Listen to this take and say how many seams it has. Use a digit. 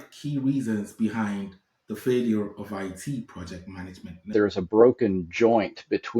1